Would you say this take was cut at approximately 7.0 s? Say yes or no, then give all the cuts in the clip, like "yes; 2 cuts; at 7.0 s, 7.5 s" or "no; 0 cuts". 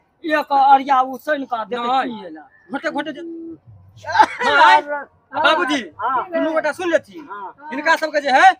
no; 1 cut; at 3.0 s